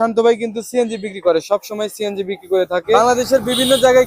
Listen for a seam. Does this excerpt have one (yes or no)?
yes